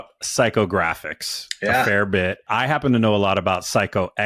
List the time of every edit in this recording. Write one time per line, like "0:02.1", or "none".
0:02.5